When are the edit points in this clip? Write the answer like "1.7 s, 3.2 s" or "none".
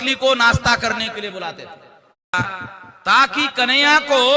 2.3 s

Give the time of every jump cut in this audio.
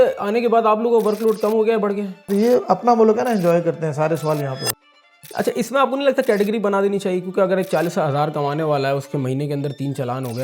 2.3 s, 4.8 s

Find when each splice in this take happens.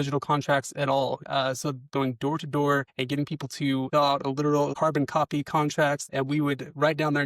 1.5 s, 3.9 s, 4.7 s, 6.0 s

